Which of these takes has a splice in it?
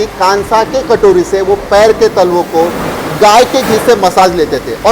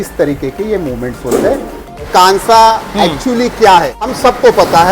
second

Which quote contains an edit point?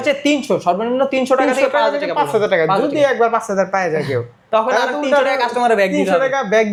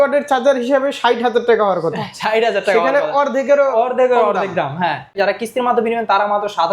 second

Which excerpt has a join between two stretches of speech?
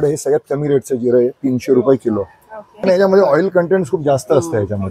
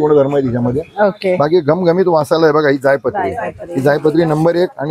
first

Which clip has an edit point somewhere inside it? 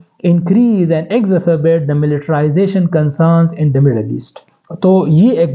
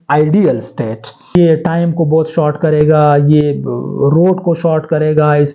second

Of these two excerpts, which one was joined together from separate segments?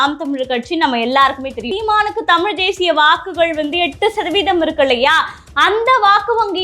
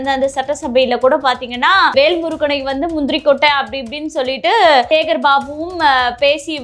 first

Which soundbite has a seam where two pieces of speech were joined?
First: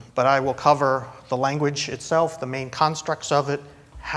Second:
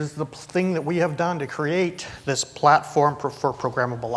second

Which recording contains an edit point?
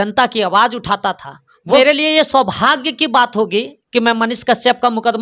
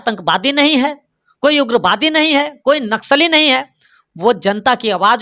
first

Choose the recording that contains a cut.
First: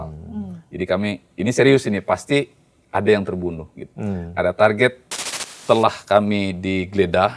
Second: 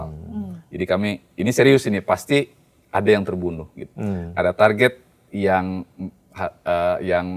first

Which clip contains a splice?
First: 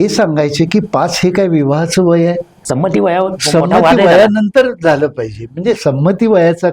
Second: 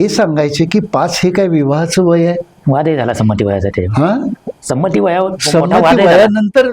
first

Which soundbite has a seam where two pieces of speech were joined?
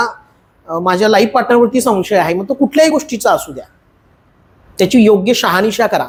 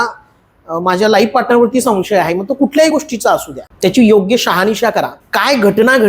second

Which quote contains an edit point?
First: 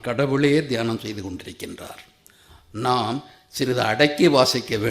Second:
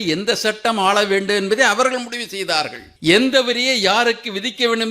second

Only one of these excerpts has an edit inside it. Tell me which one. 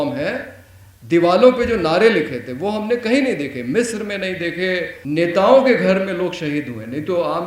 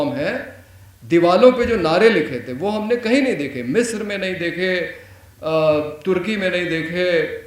first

